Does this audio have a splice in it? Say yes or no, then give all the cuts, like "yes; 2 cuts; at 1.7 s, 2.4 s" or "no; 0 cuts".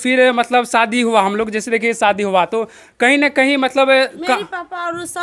no; 0 cuts